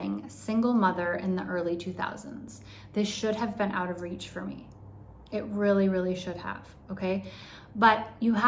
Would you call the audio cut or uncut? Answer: uncut